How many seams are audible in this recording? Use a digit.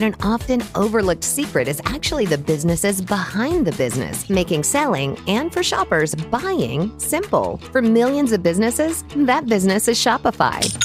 0